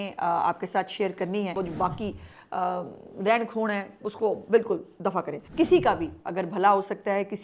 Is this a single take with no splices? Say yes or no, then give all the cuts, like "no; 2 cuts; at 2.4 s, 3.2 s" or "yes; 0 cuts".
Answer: no; 2 cuts; at 1.6 s, 5.4 s